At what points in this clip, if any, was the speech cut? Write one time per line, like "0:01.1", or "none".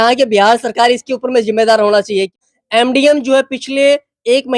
0:02.4